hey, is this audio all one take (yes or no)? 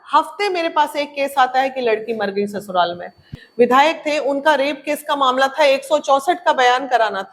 no